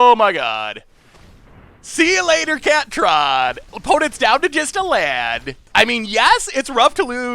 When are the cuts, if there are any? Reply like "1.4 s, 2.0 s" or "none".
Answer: 3.7 s, 5.6 s